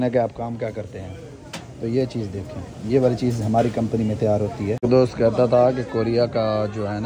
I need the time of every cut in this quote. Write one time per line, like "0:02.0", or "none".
0:04.8